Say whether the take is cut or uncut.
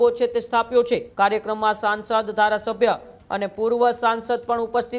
cut